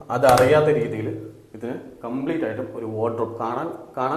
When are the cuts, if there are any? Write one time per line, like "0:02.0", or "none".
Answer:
none